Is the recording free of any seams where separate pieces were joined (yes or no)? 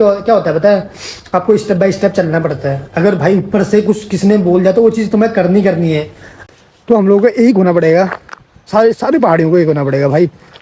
no